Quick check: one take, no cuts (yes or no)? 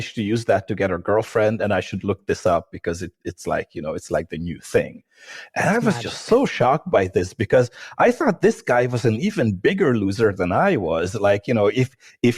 yes